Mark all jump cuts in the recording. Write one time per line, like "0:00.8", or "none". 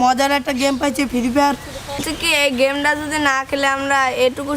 0:02.0